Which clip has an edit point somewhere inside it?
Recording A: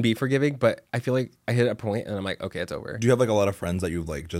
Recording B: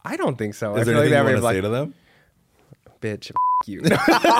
A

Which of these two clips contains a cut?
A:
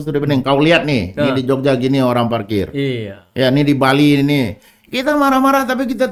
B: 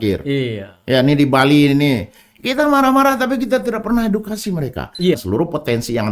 B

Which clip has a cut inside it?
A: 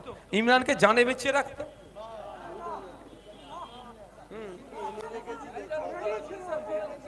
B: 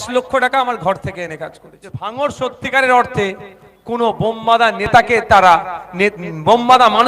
B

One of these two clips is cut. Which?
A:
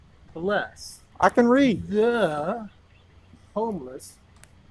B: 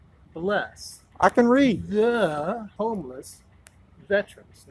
B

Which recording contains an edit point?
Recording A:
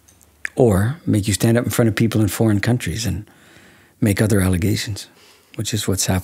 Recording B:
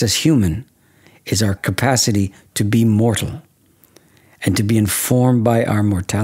B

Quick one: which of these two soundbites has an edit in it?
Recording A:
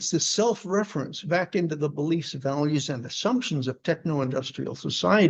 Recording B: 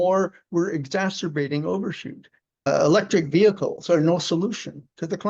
B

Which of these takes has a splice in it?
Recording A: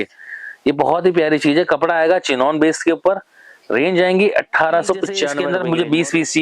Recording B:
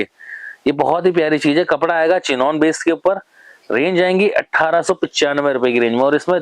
A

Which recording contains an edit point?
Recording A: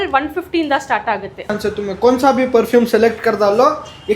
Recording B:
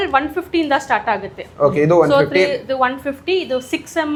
A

